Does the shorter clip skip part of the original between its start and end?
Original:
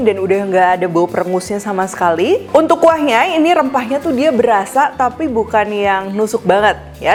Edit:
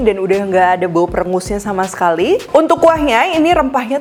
no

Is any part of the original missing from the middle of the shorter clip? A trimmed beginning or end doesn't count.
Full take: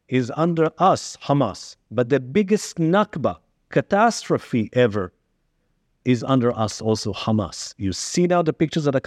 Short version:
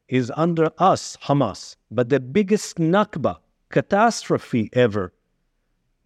no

